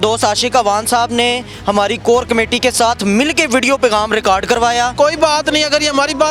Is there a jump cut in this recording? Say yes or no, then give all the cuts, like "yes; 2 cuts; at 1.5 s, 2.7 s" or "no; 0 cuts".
yes; 1 cut; at 4.9 s